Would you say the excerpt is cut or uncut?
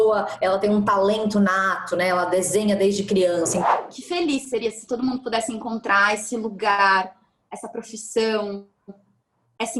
cut